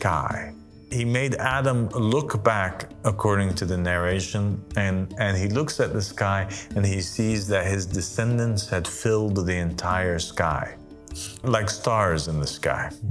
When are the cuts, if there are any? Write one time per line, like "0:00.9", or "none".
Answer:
0:00.9
0:11.4